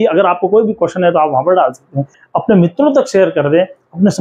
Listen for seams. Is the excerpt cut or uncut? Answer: cut